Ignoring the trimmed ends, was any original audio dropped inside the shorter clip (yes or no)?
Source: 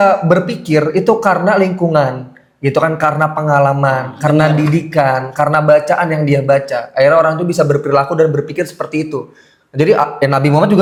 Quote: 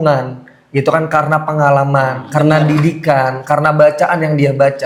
no